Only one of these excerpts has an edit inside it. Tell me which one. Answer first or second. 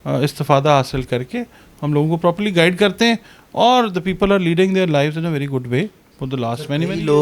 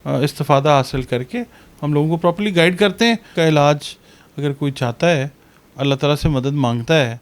second